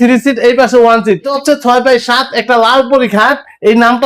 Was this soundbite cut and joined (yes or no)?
yes